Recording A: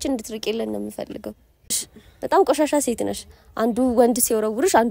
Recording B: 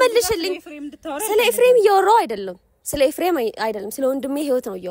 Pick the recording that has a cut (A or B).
A